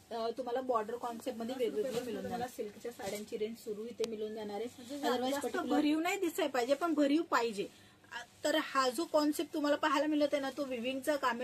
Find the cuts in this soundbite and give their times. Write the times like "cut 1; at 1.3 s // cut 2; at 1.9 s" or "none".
cut 1; at 2.3 s // cut 2; at 5.5 s